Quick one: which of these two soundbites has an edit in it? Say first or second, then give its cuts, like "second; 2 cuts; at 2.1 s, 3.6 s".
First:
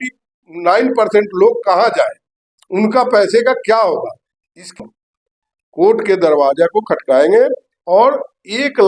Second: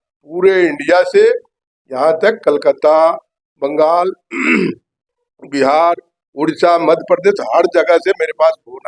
first; 1 cut; at 4.8 s